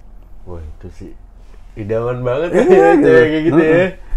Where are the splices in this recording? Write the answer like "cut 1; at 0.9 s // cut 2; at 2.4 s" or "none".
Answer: none